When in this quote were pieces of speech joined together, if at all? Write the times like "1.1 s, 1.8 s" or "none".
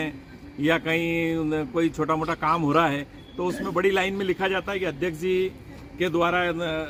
none